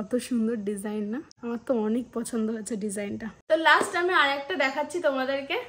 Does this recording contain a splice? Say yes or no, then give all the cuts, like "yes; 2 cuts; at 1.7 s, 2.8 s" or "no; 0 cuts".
yes; 2 cuts; at 1.3 s, 3.3 s